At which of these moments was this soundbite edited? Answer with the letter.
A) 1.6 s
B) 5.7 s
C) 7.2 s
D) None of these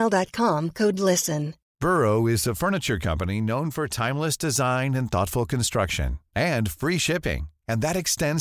A